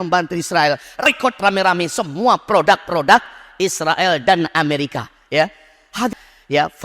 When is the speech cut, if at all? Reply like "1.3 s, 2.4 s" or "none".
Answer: 1.1 s, 6.1 s